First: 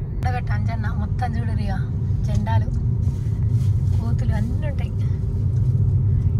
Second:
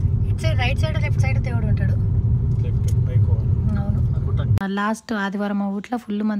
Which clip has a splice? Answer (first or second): second